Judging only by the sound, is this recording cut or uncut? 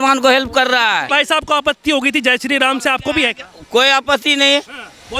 cut